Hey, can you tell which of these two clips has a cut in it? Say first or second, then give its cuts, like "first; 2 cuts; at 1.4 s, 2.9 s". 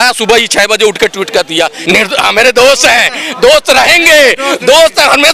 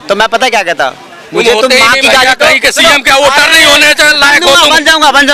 first; 1 cut; at 1.8 s